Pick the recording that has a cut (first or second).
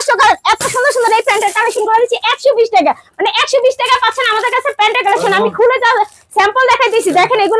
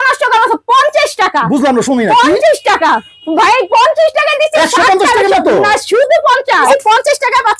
second